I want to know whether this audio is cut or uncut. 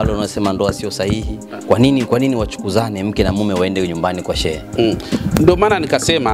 uncut